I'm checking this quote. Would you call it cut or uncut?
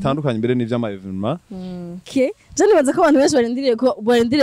cut